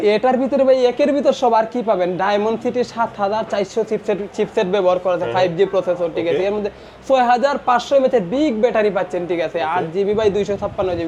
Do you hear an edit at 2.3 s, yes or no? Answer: no